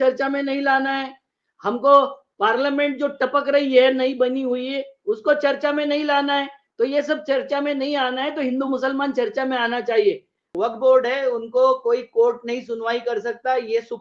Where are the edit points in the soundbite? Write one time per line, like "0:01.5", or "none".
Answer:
0:10.5